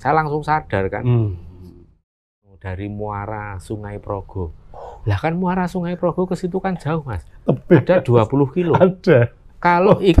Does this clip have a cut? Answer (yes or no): yes